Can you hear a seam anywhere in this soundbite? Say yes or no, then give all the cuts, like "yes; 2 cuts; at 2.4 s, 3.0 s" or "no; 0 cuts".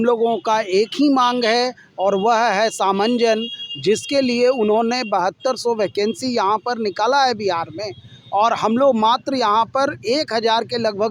no; 0 cuts